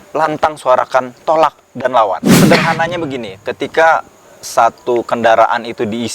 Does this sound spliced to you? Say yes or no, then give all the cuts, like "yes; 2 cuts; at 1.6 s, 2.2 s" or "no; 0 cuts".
yes; 1 cut; at 2.3 s